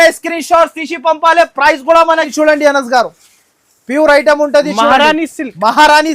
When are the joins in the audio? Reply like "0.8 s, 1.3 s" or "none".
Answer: 2.3 s